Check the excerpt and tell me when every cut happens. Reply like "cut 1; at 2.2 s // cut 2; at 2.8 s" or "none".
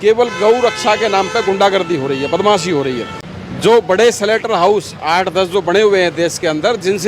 cut 1; at 3.1 s